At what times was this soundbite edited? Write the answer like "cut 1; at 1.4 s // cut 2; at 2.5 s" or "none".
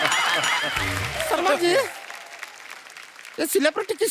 cut 1; at 1.1 s